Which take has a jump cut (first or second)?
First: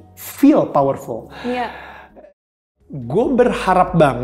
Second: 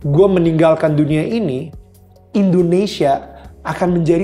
first